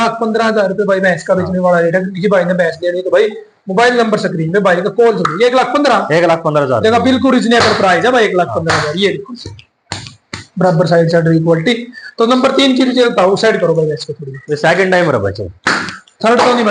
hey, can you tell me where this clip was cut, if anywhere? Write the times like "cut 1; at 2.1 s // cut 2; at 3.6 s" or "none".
none